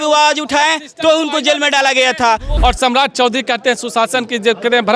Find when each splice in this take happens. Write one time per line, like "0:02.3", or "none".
0:02.5